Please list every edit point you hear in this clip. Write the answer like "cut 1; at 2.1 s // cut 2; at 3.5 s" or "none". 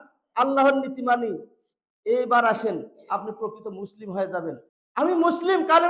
cut 1; at 4.7 s